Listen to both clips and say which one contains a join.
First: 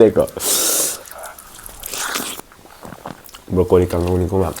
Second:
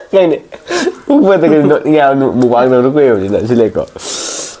first; 1 cut; at 2.4 s

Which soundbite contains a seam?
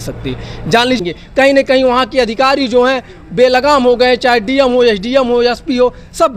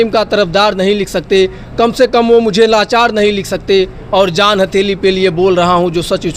first; 1 cut; at 1.0 s

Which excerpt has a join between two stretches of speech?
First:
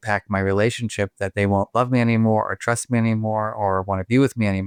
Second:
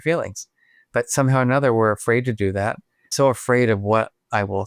second; 1 cut; at 3.1 s

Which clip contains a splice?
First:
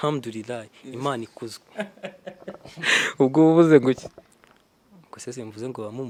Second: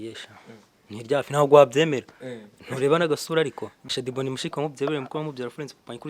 second; 1 cut; at 3.9 s

